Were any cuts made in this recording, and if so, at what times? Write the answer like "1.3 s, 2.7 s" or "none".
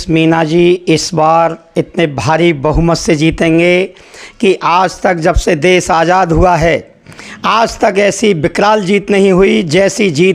none